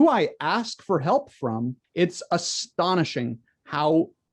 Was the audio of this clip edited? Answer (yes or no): no